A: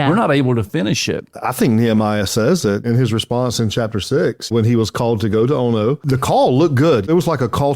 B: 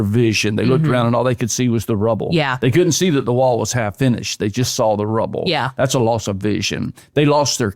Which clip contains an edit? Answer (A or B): A